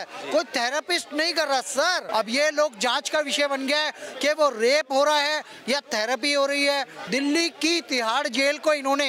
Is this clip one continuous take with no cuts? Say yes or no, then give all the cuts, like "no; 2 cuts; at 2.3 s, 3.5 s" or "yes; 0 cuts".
no; 2 cuts; at 2.0 s, 7.0 s